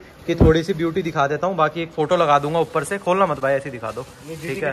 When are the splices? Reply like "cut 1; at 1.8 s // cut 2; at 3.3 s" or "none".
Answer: none